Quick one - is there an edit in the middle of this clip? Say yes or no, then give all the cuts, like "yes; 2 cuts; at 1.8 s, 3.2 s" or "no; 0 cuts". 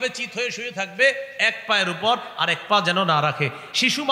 no; 0 cuts